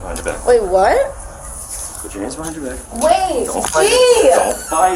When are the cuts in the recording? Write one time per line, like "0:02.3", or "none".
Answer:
none